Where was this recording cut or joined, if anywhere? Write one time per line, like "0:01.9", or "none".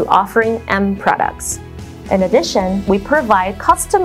0:01.8